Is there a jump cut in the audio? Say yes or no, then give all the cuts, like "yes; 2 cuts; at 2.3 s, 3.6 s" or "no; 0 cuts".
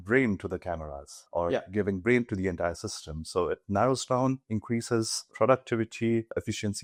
no; 0 cuts